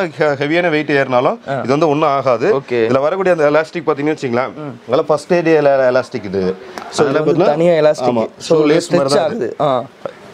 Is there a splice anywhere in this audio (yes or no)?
no